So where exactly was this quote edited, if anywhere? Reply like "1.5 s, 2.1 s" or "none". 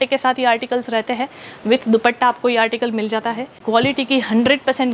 3.6 s